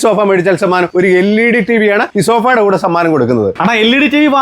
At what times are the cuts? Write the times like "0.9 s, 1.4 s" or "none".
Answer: 0.9 s, 2.1 s, 3.5 s